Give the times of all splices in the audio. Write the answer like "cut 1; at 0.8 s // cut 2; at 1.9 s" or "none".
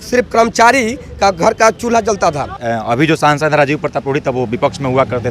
cut 1; at 2.6 s